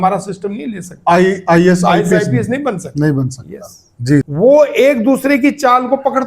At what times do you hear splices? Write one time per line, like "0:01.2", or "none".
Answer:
0:04.3